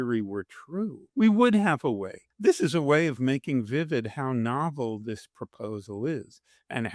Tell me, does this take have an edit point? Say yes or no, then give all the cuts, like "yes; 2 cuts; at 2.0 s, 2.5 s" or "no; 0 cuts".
yes; 2 cuts; at 1.0 s, 2.3 s